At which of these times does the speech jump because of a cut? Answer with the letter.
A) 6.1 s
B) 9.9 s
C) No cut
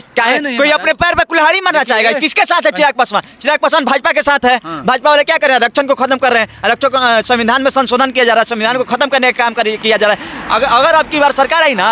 C